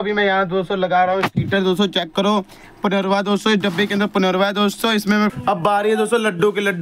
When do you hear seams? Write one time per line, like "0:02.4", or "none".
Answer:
0:05.3